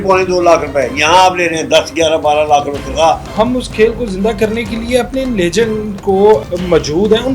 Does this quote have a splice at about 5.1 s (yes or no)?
no